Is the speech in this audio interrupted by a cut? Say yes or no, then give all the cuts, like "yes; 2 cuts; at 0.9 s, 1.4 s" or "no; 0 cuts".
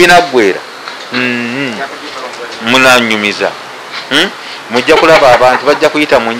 no; 0 cuts